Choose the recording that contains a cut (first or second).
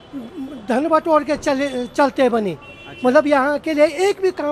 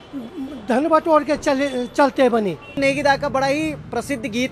second